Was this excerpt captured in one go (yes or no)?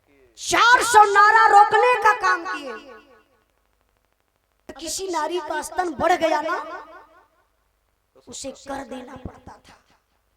no